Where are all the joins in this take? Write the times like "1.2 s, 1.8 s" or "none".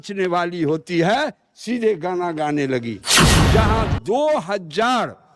3.3 s

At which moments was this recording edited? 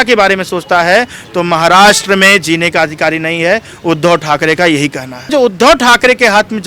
5.3 s

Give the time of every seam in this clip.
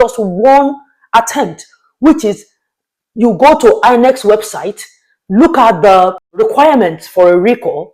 6.3 s

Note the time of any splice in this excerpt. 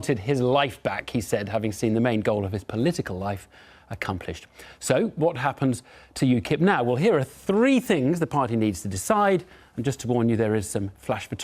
3.0 s

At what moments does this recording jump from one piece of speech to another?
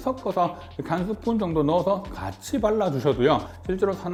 none

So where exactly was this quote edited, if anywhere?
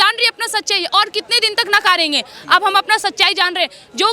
none

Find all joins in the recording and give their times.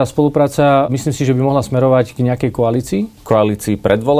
0.9 s, 3.2 s

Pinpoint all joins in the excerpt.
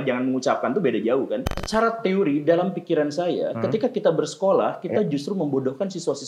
1.5 s

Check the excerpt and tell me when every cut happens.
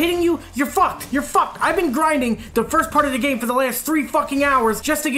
1.5 s

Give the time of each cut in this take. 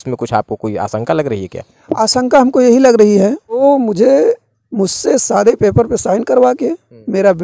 3.6 s

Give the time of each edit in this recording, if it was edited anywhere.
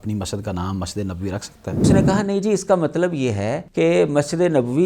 1.9 s, 3.6 s

